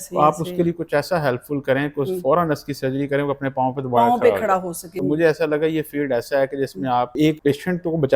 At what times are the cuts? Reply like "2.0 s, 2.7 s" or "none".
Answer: 4.8 s, 7.2 s